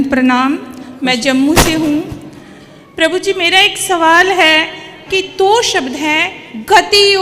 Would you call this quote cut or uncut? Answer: cut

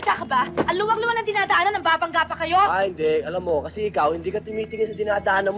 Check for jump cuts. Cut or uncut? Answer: uncut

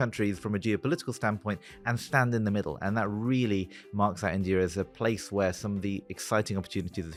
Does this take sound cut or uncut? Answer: uncut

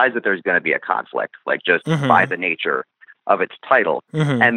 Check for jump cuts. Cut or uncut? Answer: uncut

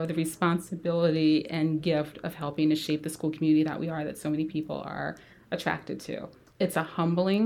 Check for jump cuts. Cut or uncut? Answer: cut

